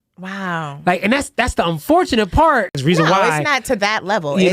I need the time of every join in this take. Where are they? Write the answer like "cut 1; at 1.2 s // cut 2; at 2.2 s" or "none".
cut 1; at 2.7 s